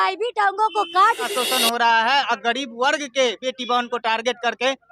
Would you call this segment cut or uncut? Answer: cut